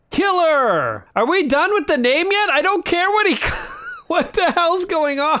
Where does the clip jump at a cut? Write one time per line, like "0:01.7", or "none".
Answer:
0:01.0